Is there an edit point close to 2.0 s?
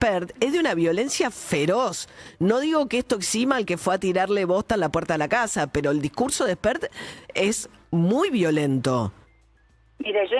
no; 0 cuts

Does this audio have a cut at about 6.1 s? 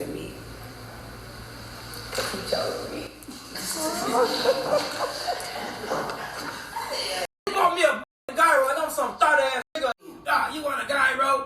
no; 2 cuts; at 7.5 s, 10.1 s

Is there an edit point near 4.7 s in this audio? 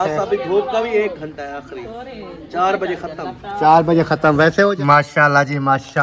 yes; 1 cut; at 4.7 s

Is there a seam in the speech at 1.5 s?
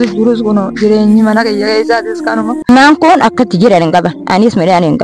no; 1 cut; at 2.7 s

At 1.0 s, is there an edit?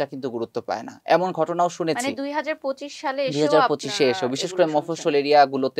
no; 0 cuts

